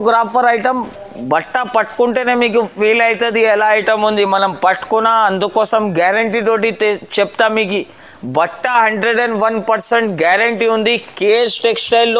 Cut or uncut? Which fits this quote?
uncut